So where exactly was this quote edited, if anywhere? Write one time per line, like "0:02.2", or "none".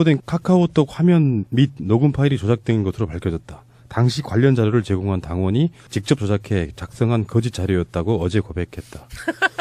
none